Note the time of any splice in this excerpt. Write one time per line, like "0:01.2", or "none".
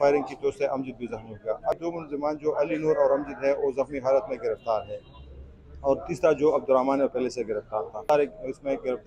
0:01.8
0:08.0